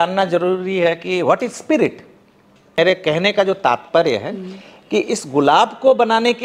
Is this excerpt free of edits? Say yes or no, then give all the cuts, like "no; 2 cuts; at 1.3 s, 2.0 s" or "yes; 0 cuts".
no; 1 cut; at 2.6 s